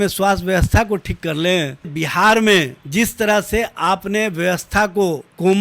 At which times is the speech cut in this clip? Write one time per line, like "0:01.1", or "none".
0:02.0